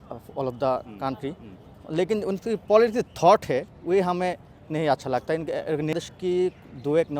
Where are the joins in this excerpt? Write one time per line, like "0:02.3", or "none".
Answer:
0:05.9